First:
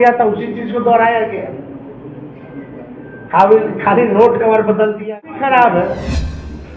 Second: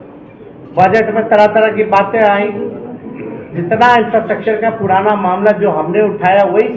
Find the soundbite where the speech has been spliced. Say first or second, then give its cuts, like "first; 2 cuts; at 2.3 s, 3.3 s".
first; 1 cut; at 5.3 s